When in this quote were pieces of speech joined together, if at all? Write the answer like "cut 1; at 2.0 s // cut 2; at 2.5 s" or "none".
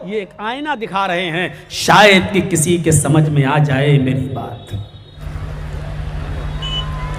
cut 1; at 5.2 s